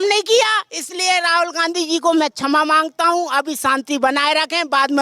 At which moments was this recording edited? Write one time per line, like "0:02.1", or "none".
none